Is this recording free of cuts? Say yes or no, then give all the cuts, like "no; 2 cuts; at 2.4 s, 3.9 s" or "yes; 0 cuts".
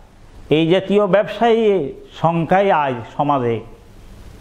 yes; 0 cuts